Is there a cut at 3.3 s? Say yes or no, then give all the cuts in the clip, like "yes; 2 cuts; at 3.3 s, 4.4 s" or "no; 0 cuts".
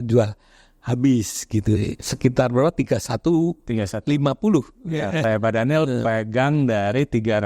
no; 2 cuts; at 2.1 s, 5.2 s